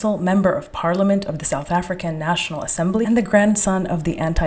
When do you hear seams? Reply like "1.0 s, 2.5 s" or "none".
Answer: 3.0 s